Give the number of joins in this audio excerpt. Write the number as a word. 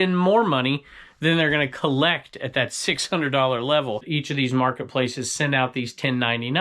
one